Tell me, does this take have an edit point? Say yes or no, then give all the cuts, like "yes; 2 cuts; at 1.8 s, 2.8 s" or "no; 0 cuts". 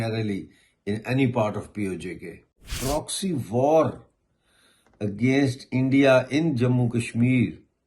yes; 1 cut; at 2.7 s